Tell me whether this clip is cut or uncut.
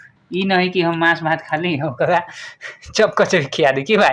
uncut